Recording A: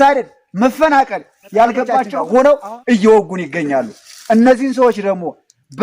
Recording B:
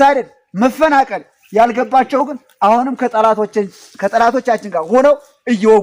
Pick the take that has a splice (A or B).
A